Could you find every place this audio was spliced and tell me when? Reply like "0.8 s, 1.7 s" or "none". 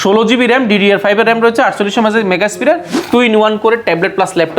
2.9 s

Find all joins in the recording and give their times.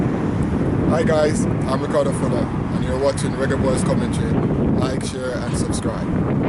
none

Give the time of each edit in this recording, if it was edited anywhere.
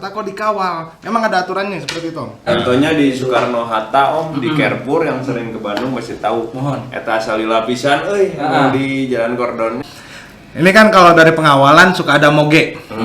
2.5 s, 9.9 s

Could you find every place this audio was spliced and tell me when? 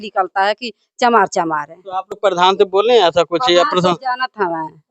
none

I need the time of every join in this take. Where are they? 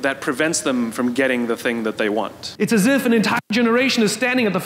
2.4 s

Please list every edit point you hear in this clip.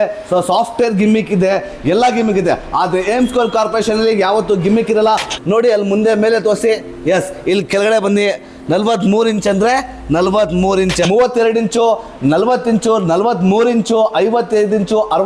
5.3 s, 11.1 s

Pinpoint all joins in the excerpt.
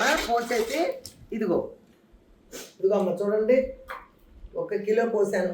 1.9 s

